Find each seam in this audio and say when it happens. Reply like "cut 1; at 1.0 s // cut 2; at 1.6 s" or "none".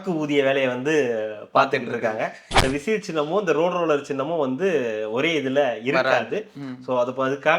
cut 1; at 2.5 s